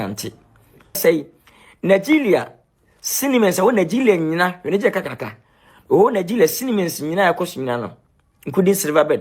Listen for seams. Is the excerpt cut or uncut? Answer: cut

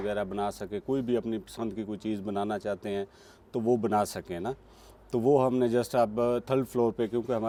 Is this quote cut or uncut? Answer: uncut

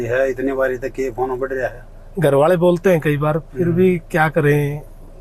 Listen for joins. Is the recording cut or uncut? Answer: uncut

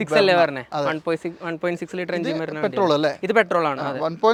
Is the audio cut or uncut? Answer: uncut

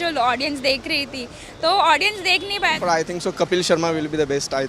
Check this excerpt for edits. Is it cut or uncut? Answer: cut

